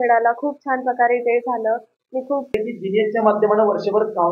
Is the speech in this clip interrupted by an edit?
yes; 1 cut; at 2.6 s

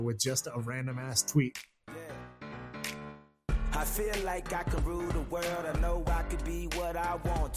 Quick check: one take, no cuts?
no; 1 cut; at 1.6 s

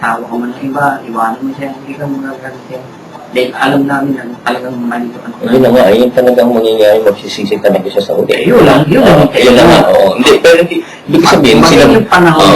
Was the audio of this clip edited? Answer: yes; 1 cut; at 3.1 s

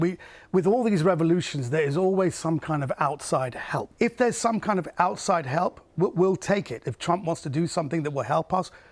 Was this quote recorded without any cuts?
no; 1 cut; at 3.9 s

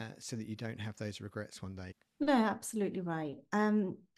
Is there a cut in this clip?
yes; 1 cut; at 2.0 s

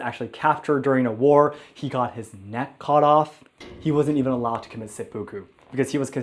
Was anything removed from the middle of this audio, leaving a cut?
no; 0 cuts

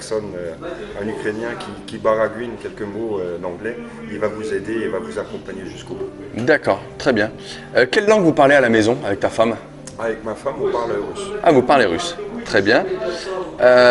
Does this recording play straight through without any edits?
yes; 0 cuts

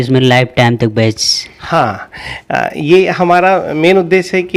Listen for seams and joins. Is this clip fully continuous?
yes; 0 cuts

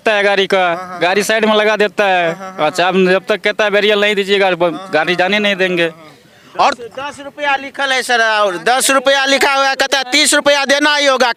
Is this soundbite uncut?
yes; 0 cuts

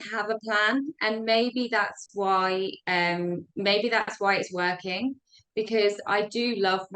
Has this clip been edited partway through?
no; 0 cuts

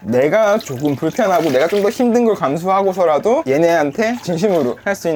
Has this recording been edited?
no; 0 cuts

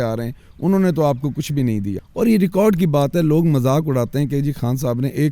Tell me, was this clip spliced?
yes; 1 cut; at 2.0 s

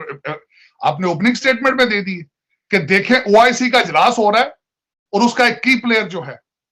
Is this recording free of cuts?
yes; 0 cuts

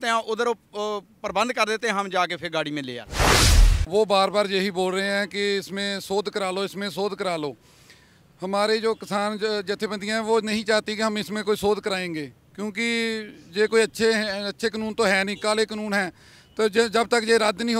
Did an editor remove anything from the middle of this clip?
yes; 1 cut; at 3.4 s

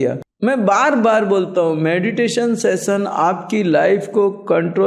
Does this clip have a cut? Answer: no; 0 cuts

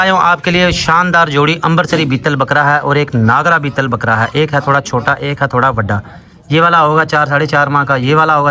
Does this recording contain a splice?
no; 0 cuts

